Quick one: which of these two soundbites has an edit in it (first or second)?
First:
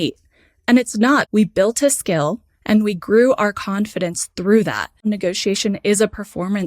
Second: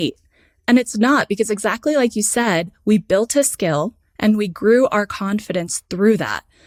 first